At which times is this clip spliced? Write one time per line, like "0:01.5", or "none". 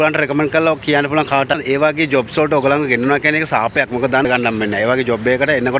0:01.6
0:04.2